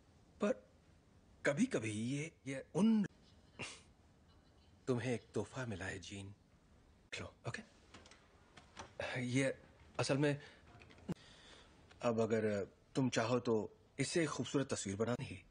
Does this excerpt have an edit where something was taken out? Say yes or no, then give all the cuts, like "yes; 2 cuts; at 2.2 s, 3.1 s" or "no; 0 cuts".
no; 0 cuts